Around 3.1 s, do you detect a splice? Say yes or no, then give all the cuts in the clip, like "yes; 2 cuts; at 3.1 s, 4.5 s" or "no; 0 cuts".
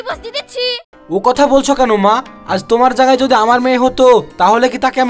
no; 1 cut; at 1.0 s